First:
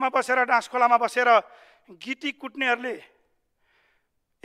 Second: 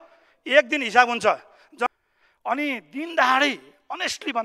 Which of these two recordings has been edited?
second; 1 cut; at 1.9 s

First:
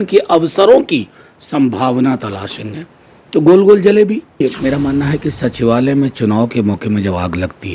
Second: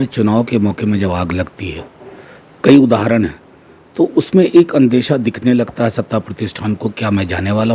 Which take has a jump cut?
first; 1 cut; at 4.4 s

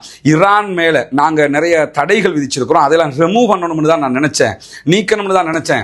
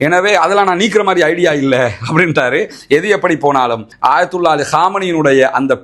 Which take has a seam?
second; 1 cut; at 2.8 s

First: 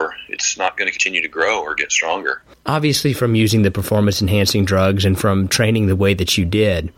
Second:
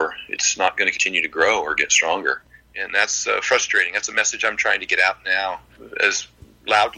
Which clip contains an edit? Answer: second; 2 cuts; at 2.5 s, 5.8 s

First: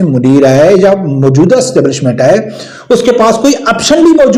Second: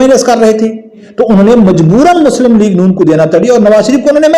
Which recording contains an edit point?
second; 1 cut; at 1.0 s

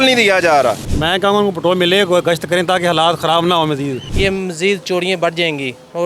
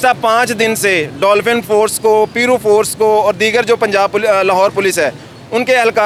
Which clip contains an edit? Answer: first; 2 cuts; at 0.9 s, 4.0 s

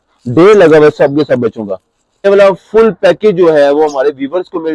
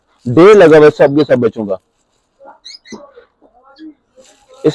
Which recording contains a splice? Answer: first; 1 cut; at 2.2 s

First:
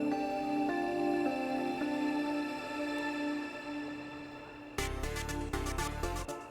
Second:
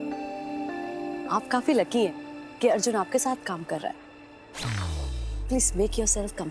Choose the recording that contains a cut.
first; 1 cut; at 1.1 s

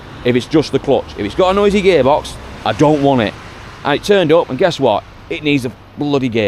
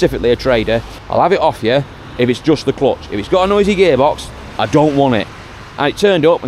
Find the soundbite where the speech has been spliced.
second; 1 cut; at 1.0 s

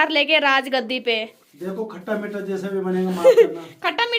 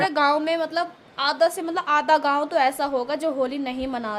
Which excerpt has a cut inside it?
first; 1 cut; at 1.4 s

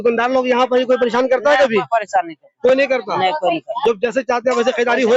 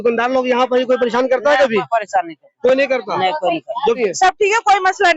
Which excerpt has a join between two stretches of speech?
second; 1 cut; at 3.9 s

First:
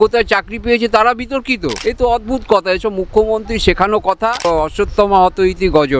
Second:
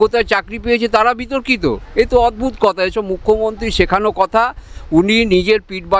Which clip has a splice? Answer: first; 2 cuts; at 1.7 s, 4.5 s

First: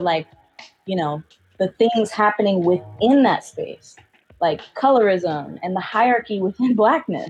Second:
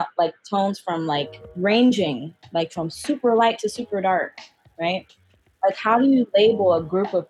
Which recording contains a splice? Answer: second; 1 cut; at 1.5 s

